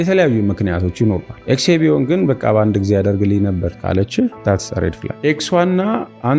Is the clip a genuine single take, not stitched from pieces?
no; 3 cuts; at 1.3 s, 3.7 s, 5.1 s

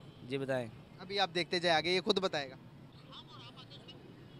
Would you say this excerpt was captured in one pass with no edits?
no; 1 cut; at 2.9 s

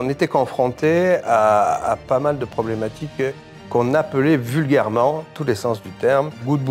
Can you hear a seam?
no; 0 cuts

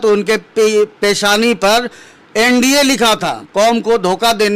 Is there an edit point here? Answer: yes; 1 cut; at 3.4 s

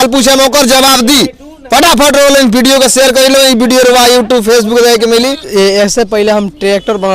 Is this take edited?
yes; 1 cut; at 5.4 s

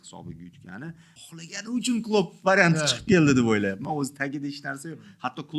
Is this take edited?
yes; 1 cut; at 1.1 s

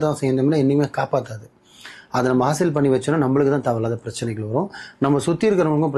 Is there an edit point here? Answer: no; 0 cuts

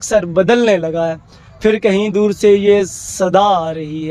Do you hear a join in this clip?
no; 0 cuts

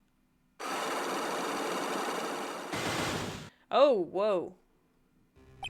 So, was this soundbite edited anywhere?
no; 0 cuts

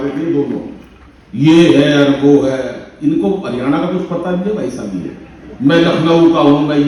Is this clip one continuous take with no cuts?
yes; 0 cuts

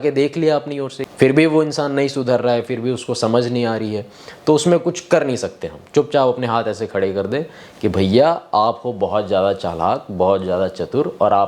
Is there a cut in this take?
yes; 1 cut; at 0.9 s

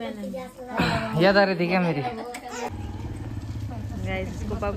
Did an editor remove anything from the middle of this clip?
yes; 1 cut; at 2.7 s

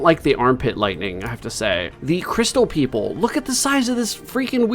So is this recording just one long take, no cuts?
no; 1 cut; at 1.9 s

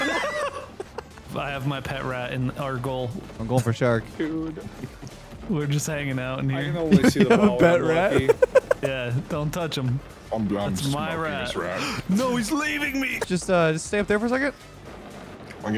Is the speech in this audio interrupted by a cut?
yes; 2 cuts; at 1.3 s, 13.2 s

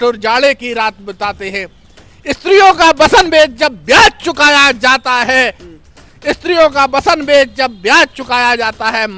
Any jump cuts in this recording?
no; 0 cuts

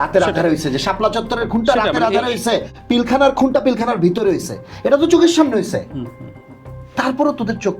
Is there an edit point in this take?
no; 0 cuts

